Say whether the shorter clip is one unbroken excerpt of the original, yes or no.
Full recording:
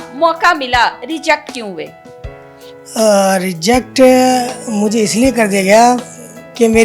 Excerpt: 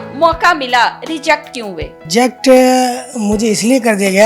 no